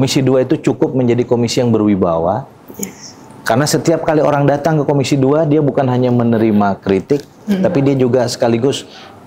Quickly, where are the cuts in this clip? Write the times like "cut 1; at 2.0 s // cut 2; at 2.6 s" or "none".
none